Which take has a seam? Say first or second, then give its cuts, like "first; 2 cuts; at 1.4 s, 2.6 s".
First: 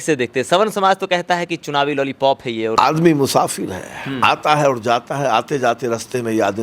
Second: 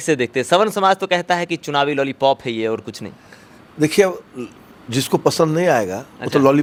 first; 1 cut; at 2.7 s